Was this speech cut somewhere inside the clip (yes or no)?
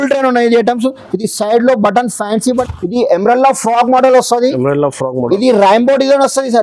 yes